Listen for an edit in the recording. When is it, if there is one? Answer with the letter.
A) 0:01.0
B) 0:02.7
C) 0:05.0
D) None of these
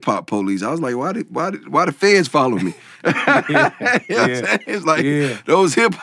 D